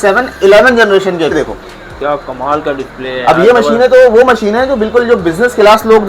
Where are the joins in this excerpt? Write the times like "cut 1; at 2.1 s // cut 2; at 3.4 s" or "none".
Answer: cut 1; at 1.3 s